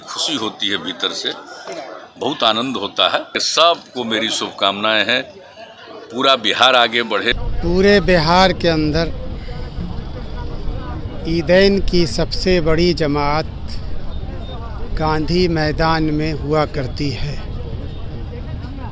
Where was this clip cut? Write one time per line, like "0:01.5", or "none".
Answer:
0:03.4
0:07.4